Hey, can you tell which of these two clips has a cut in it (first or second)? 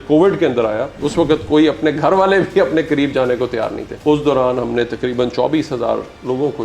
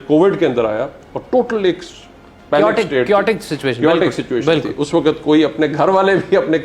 first